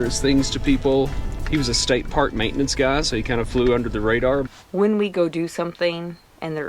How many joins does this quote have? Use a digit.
1